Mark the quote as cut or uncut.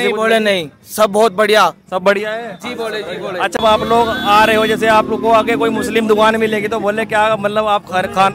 cut